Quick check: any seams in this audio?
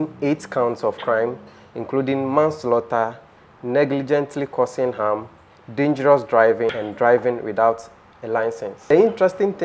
yes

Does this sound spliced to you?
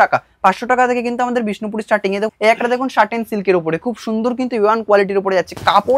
yes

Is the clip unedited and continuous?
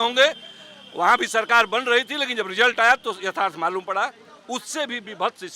yes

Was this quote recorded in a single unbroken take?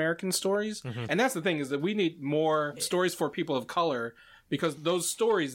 no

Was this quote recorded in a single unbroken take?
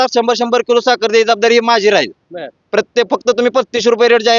yes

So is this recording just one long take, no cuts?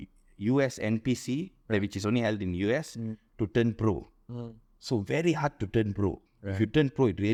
yes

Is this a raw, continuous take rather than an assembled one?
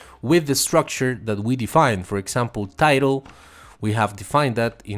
yes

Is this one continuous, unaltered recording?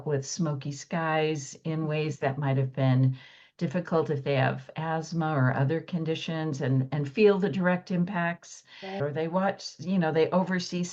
no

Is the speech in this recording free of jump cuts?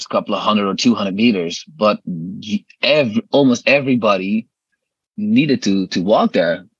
yes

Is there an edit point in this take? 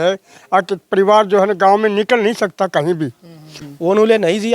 yes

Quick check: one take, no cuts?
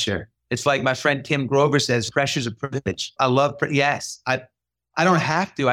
no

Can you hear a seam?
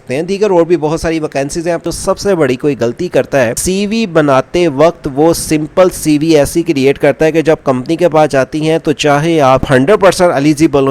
yes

